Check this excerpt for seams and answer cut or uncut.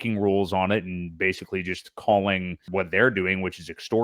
cut